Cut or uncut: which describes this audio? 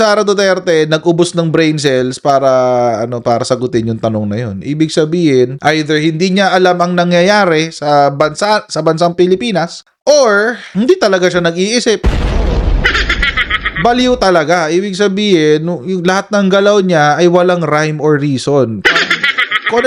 uncut